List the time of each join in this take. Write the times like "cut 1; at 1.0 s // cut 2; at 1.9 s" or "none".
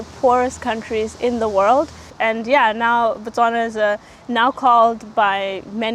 cut 1; at 2.1 s